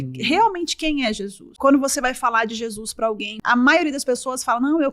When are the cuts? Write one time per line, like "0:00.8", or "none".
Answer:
0:01.5
0:03.4